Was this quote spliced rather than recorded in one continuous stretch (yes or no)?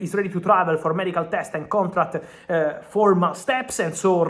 no